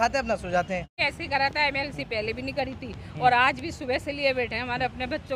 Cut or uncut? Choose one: cut